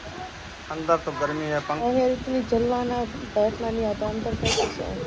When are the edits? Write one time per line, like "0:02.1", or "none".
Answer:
0:01.8